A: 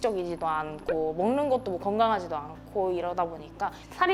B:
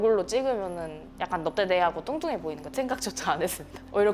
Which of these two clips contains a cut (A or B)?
B